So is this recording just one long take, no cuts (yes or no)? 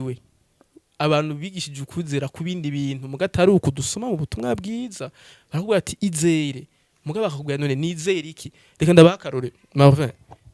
yes